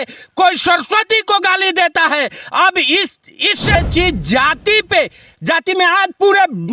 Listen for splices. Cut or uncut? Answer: cut